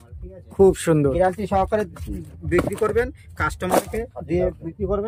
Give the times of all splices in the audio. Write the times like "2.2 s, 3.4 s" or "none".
none